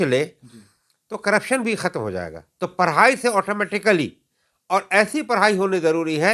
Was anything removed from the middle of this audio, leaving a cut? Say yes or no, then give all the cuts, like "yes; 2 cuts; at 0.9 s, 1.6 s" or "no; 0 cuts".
yes; 1 cut; at 2.4 s